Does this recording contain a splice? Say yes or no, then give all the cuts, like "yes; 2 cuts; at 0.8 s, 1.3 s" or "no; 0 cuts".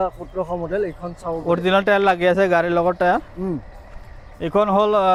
no; 0 cuts